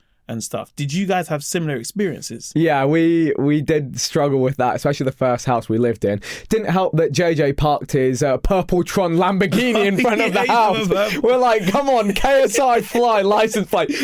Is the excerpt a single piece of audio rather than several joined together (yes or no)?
no